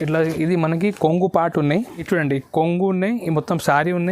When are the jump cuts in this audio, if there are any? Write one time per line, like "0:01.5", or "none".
0:02.0